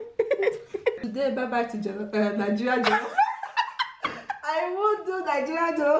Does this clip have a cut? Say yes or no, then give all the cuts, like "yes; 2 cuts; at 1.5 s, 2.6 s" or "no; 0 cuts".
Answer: yes; 1 cut; at 1.0 s